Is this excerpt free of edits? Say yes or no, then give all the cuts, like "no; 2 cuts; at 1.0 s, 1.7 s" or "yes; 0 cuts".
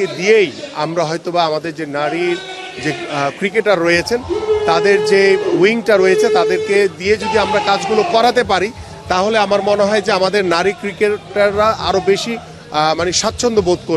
yes; 0 cuts